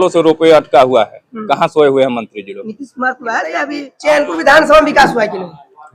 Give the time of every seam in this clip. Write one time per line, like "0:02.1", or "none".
0:03.9